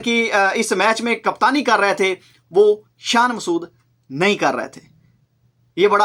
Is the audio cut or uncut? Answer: uncut